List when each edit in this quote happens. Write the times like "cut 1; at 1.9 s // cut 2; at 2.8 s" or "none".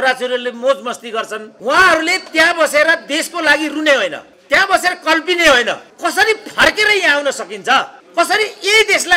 cut 1; at 1.4 s // cut 2; at 4.3 s // cut 3; at 5.9 s // cut 4; at 8.0 s